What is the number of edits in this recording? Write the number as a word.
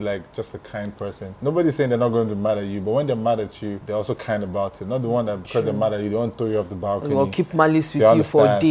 two